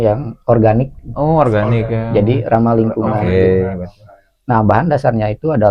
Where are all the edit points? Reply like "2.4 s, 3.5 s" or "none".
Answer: none